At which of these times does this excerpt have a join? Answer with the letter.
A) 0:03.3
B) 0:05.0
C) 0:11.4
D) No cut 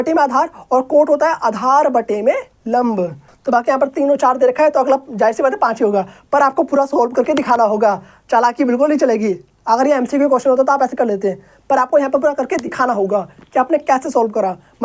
A